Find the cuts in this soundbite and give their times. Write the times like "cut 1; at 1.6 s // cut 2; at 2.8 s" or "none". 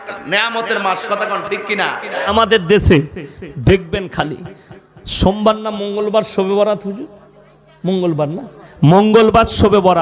cut 1; at 2.2 s